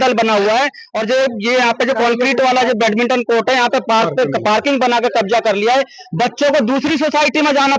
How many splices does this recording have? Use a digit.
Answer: 0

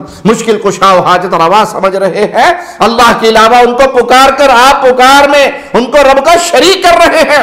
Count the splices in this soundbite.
1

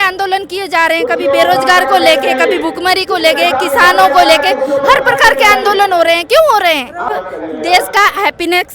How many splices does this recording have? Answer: 1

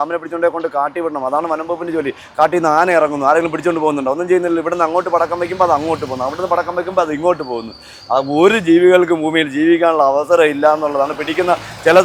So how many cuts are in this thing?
0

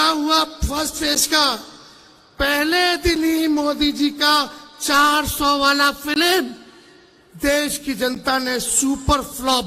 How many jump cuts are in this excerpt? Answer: 0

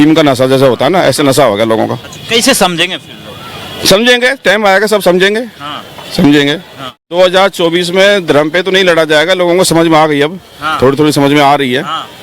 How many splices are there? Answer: 1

